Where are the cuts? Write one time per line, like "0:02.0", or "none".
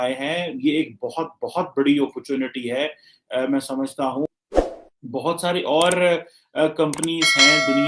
0:04.4